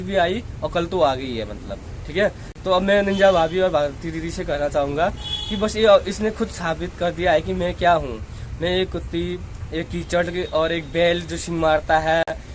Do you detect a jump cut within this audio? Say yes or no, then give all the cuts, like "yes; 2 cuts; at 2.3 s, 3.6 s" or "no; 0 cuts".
no; 0 cuts